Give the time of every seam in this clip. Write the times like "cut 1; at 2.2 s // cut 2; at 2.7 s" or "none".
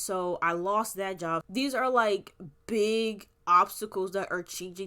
cut 1; at 1.5 s